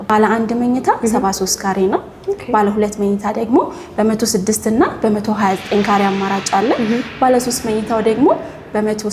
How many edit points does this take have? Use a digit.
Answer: 0